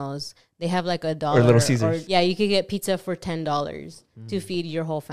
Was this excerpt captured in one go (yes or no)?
no